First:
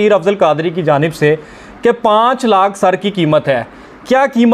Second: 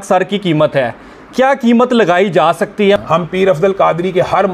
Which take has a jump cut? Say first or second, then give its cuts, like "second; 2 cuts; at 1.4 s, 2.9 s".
second; 1 cut; at 3.0 s